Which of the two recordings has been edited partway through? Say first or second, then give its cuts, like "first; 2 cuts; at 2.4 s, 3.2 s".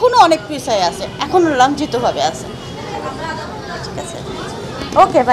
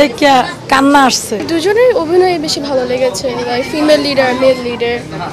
second; 1 cut; at 1.3 s